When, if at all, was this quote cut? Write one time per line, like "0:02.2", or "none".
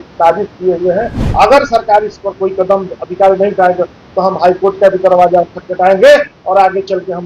0:01.2